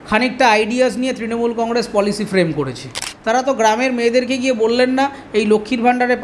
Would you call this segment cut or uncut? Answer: cut